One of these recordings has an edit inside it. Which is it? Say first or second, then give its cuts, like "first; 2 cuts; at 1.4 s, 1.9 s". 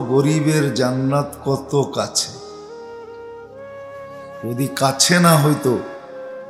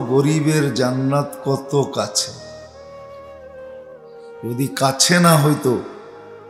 second; 2 cuts; at 2.8 s, 4.4 s